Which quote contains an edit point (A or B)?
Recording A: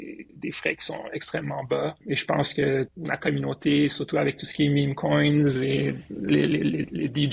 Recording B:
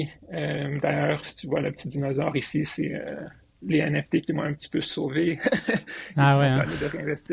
A